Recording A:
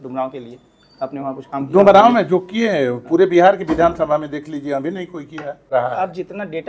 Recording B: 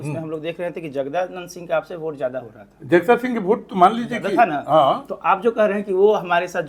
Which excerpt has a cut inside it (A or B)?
A